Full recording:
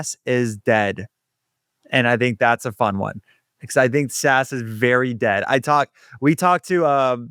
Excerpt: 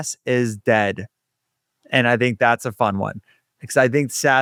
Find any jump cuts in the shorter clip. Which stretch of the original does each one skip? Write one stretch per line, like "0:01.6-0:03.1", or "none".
none